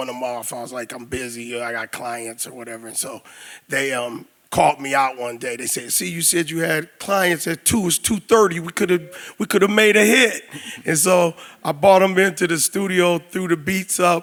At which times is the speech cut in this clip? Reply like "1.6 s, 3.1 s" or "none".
none